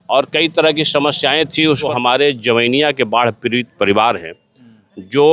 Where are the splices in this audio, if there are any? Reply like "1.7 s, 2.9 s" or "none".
1.9 s